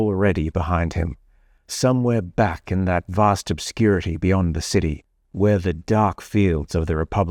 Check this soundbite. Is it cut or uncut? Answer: uncut